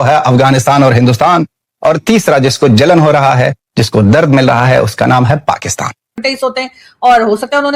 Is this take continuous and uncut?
no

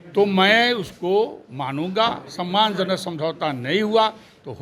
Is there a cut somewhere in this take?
no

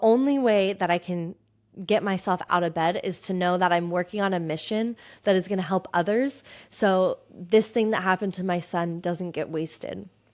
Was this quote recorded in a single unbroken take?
yes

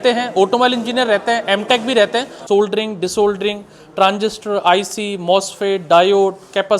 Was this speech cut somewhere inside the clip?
yes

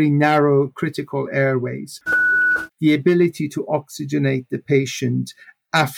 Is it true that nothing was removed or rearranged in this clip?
no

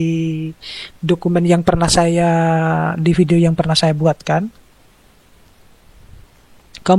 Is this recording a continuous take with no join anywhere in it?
yes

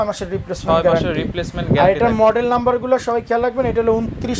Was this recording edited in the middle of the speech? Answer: no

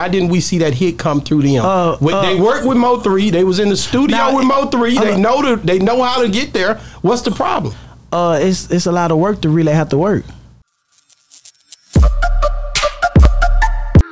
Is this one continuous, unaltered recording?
no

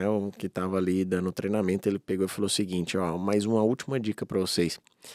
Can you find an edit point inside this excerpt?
no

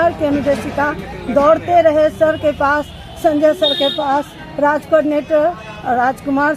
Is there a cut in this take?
no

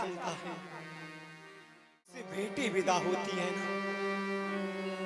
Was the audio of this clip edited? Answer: yes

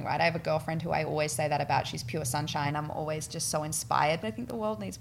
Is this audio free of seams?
no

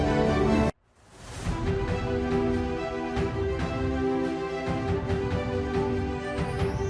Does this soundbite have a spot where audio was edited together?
no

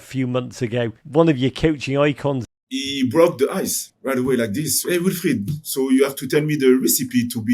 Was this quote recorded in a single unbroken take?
no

